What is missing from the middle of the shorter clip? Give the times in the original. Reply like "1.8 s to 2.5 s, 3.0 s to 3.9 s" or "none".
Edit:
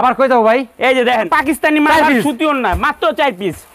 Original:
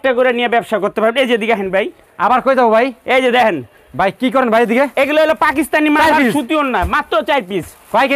3.6 s to 5.4 s